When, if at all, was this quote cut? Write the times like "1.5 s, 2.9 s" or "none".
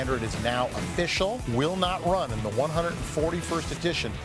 1.4 s